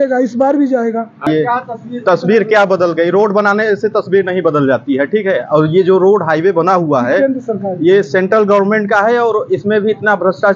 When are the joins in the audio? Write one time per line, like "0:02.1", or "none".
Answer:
0:01.3